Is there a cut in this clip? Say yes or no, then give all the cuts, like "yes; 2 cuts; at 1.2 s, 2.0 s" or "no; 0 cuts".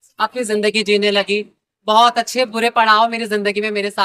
no; 0 cuts